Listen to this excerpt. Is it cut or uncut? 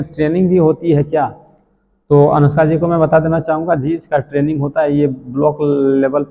uncut